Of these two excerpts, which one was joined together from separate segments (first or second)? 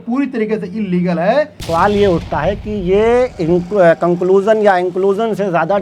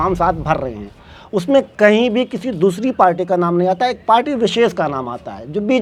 first